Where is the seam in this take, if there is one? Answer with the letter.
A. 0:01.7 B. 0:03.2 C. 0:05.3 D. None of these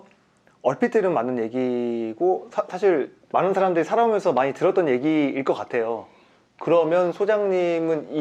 B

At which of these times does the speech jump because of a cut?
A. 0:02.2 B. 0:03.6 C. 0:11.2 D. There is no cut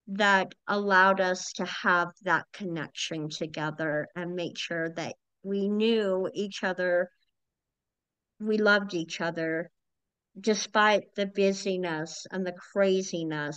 D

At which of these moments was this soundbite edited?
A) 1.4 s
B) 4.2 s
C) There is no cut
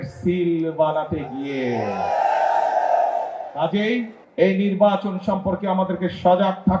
B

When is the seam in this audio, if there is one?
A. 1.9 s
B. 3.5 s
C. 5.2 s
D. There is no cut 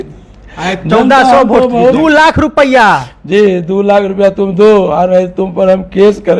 A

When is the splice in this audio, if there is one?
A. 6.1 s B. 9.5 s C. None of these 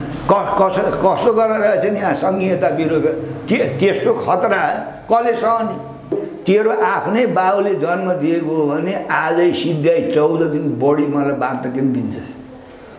A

